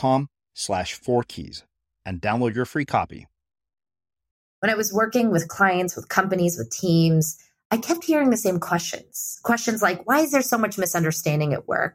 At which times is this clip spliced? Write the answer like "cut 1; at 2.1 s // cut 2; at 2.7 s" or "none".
cut 1; at 4.4 s